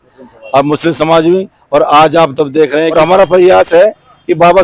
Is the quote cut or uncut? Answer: cut